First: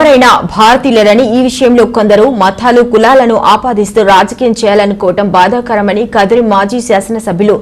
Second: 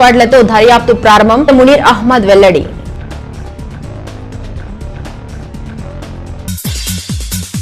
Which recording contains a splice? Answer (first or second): second